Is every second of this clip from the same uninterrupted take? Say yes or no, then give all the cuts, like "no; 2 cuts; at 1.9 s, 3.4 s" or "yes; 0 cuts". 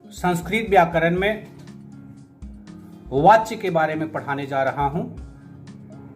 no; 3 cuts; at 1.6 s, 2.9 s, 5.3 s